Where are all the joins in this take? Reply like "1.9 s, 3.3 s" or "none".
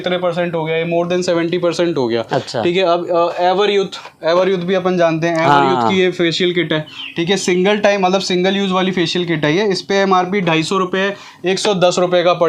none